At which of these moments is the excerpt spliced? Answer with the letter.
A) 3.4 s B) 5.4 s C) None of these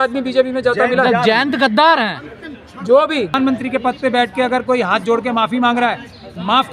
A